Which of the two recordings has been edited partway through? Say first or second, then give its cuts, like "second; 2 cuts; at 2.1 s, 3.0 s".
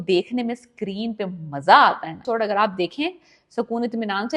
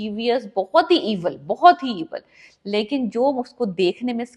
first; 1 cut; at 2.2 s